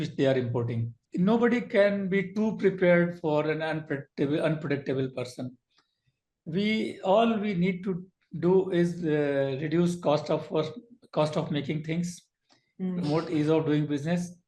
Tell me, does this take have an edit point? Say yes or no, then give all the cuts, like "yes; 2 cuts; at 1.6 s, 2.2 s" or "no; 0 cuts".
yes; 1 cut; at 1.0 s